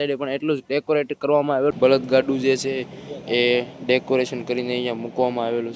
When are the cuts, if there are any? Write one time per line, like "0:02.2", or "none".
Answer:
0:01.7